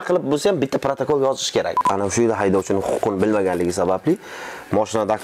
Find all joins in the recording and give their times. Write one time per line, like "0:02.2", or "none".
0:01.8